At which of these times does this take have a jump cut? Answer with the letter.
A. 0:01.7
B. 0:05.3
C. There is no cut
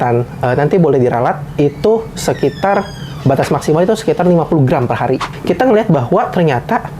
B